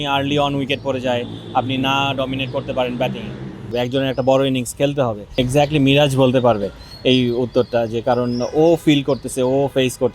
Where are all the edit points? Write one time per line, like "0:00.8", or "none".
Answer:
0:03.7
0:05.2